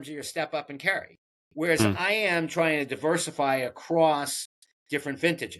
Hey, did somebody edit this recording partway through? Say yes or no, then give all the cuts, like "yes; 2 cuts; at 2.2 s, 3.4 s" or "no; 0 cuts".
no; 0 cuts